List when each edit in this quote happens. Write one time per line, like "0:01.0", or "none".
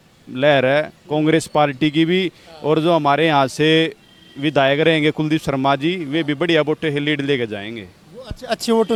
none